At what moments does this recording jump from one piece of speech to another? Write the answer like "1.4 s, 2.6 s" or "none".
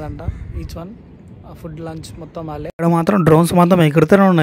2.7 s